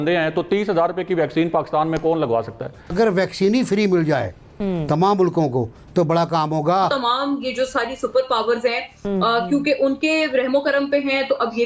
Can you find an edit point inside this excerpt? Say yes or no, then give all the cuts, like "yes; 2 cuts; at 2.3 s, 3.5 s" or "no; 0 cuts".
yes; 2 cuts; at 2.8 s, 6.9 s